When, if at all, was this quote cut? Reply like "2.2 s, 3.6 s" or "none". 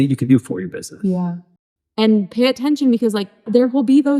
1.7 s, 3.4 s